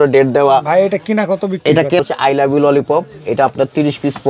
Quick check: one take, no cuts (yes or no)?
no